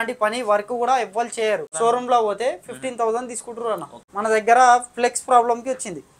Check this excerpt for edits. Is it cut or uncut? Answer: cut